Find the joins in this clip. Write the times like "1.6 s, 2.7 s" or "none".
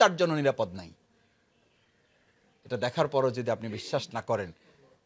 none

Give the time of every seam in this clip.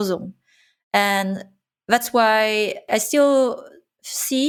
none

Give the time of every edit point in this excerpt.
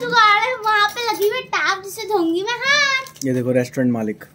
none

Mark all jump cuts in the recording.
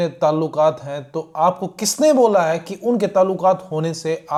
none

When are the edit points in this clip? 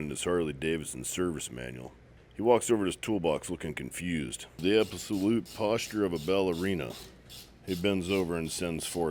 2.2 s, 4.4 s

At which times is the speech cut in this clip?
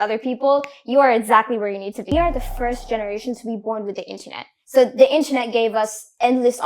2.1 s

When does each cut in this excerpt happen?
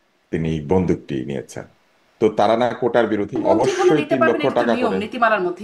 3.4 s

